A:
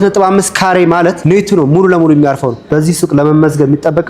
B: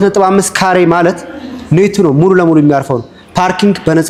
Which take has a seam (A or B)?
A